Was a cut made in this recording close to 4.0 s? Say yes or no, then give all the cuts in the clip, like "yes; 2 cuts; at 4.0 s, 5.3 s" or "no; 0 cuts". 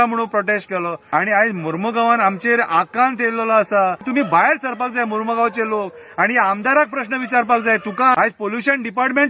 yes; 3 cuts; at 1.0 s, 4.0 s, 8.1 s